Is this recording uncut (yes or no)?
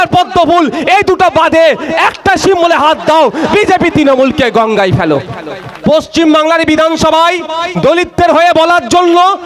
no